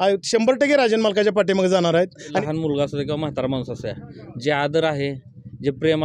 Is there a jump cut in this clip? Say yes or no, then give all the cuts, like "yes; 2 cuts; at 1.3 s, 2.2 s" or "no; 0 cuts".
yes; 1 cut; at 2.4 s